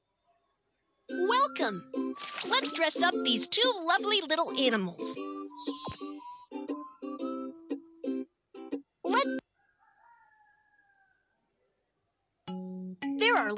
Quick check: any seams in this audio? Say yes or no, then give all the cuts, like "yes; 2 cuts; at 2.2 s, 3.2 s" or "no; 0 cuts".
no; 0 cuts